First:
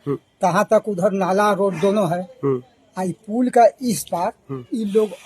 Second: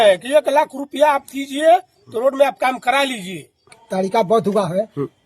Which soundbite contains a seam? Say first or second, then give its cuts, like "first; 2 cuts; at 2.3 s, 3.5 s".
second; 1 cut; at 3.8 s